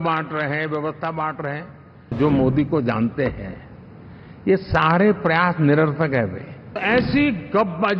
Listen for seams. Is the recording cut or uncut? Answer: cut